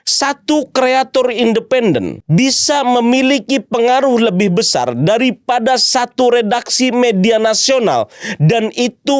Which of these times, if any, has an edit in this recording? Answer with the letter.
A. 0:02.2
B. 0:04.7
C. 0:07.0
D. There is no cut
A